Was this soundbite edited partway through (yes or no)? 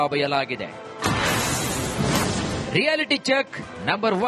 no